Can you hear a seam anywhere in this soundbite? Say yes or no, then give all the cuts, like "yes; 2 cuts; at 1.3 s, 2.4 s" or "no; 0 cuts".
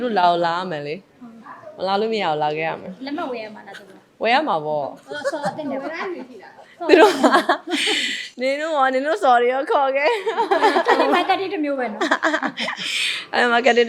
no; 0 cuts